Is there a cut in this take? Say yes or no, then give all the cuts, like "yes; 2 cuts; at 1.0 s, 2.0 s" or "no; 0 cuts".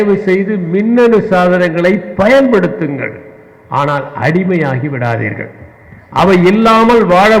no; 0 cuts